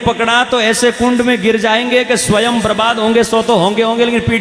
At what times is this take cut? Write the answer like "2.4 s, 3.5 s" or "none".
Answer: none